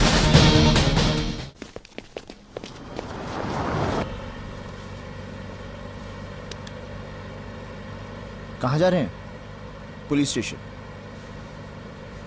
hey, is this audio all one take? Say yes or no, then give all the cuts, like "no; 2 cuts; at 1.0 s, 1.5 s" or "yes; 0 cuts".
no; 1 cut; at 4.0 s